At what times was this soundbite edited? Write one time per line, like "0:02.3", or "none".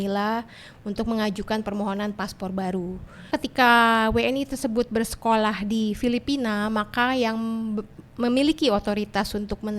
0:03.3